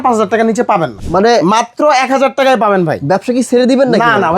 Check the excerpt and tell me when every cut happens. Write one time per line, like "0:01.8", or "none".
0:01.0